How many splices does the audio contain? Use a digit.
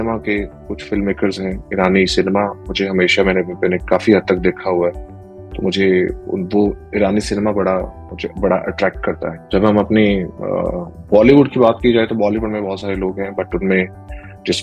0